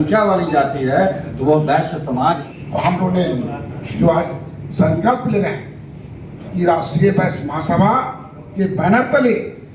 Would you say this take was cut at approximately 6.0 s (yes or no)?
no